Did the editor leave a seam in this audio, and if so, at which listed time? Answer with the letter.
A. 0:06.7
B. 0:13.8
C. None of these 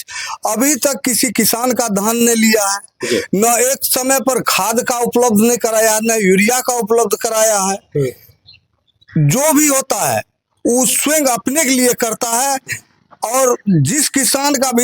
C